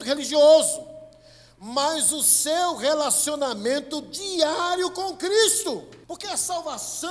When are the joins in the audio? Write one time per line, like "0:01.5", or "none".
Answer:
0:05.9